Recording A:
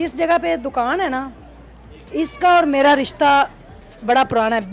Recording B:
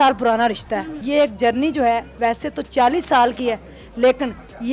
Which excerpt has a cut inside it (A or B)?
B